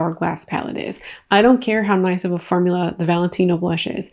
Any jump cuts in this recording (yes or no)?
no